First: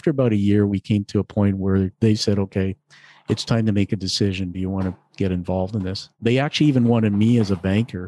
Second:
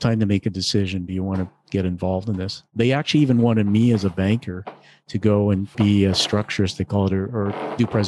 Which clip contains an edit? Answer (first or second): second